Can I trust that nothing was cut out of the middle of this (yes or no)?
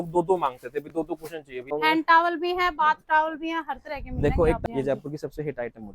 no